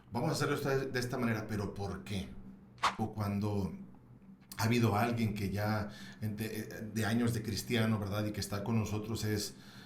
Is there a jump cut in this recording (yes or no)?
yes